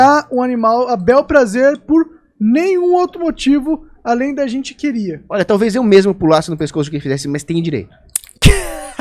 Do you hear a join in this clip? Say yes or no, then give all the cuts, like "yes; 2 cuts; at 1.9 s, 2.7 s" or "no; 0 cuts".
no; 0 cuts